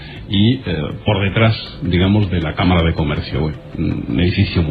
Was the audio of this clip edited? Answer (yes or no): no